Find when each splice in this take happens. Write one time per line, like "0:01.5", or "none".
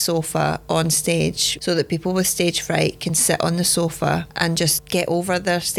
0:01.5
0:04.8